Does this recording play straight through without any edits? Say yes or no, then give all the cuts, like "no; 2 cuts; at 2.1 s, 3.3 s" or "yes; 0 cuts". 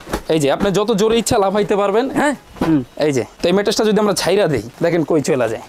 no; 2 cuts; at 3.3 s, 4.7 s